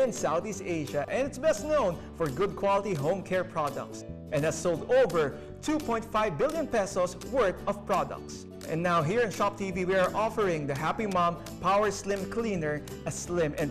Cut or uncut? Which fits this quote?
uncut